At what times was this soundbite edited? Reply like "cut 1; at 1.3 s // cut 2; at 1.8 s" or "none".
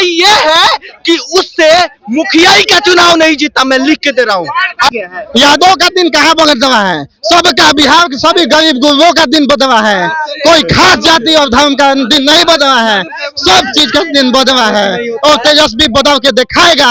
cut 1; at 4.9 s